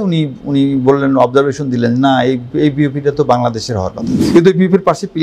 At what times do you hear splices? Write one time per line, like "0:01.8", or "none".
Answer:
0:04.2